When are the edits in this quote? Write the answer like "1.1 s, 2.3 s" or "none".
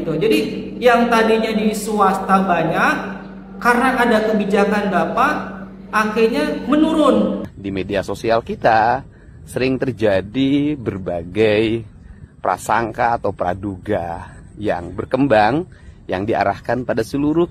7.5 s